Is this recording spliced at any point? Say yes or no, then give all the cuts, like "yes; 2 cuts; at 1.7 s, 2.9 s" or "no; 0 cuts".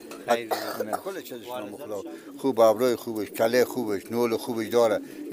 yes; 1 cut; at 1.4 s